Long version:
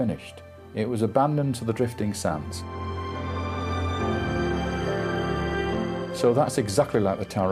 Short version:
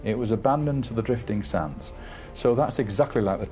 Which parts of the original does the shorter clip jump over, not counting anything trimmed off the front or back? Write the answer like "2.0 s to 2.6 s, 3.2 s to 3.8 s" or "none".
3.0 s to 6.1 s